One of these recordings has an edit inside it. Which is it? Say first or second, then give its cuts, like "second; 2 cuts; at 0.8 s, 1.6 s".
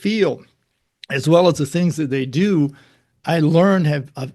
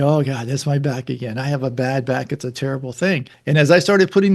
second; 1 cut; at 3.3 s